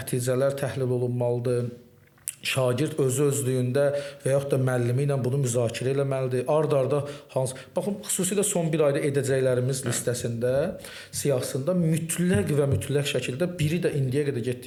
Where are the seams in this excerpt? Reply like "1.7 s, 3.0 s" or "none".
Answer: none